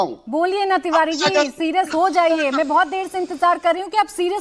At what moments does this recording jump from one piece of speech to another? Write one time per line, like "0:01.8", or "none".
none